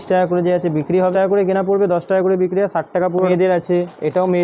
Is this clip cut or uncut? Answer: cut